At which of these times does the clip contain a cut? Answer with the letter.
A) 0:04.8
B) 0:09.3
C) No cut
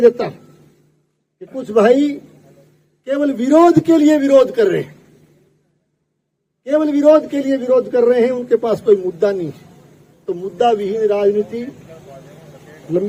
C